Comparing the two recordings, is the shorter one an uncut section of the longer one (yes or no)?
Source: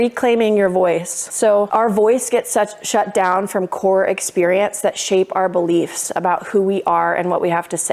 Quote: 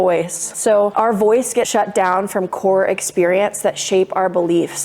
no